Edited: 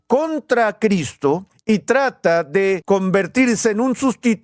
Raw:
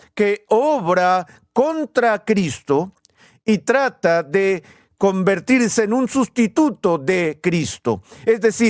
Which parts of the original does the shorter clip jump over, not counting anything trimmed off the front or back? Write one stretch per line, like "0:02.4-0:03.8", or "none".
0:03.0-0:03.3
0:04.6-0:04.9